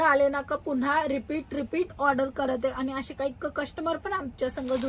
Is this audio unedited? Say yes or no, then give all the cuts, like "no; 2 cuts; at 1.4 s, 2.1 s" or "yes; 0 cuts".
yes; 0 cuts